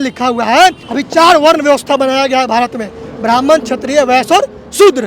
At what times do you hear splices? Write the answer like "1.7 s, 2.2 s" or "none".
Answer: none